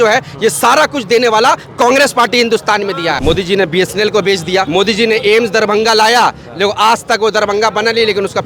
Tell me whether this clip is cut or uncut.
cut